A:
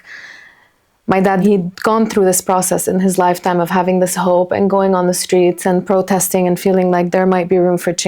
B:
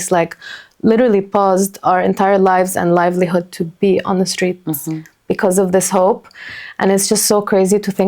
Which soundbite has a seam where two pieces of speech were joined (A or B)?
A